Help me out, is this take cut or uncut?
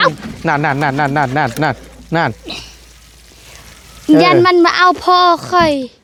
uncut